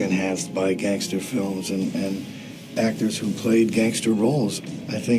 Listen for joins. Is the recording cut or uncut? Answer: uncut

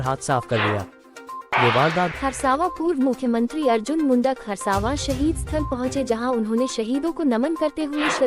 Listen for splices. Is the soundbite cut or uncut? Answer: cut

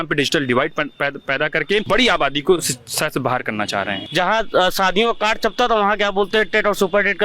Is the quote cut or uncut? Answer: cut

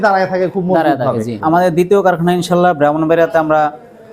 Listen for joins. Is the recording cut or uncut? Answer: cut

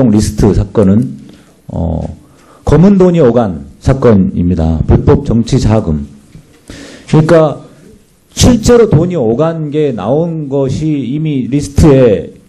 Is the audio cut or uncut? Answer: uncut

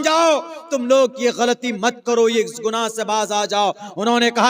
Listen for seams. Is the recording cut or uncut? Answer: uncut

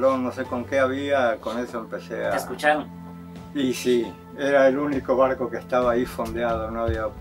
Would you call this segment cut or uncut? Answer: uncut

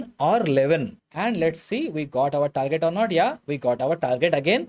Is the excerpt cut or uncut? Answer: cut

